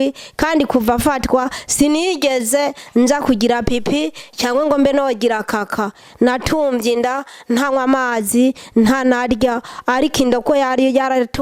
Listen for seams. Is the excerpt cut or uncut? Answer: uncut